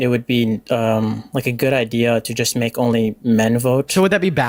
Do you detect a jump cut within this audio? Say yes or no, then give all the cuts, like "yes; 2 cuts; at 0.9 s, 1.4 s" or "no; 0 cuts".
no; 0 cuts